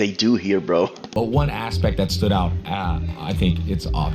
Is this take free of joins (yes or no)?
no